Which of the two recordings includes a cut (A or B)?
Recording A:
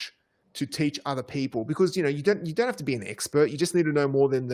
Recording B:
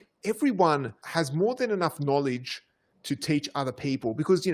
B